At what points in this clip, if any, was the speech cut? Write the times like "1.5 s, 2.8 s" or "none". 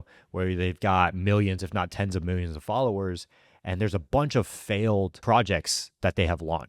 5.2 s